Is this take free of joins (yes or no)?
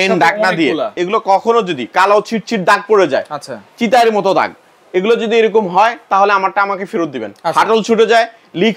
no